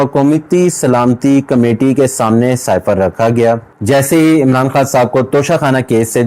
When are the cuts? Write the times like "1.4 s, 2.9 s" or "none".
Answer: 3.7 s